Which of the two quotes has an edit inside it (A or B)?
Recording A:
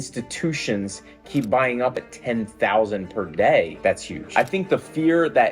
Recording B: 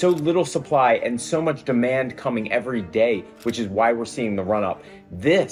A